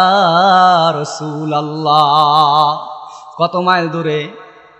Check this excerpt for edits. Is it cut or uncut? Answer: uncut